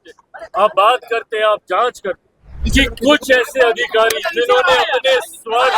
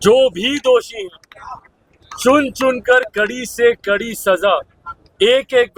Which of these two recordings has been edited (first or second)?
first